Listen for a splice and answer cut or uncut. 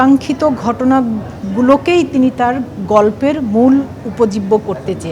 uncut